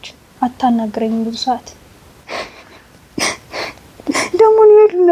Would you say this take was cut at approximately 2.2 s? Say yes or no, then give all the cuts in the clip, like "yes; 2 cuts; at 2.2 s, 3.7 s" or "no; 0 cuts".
yes; 1 cut; at 2.2 s